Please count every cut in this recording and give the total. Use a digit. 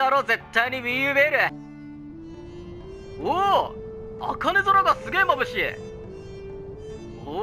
1